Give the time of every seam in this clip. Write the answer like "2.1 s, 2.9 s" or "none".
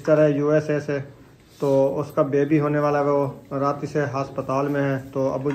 none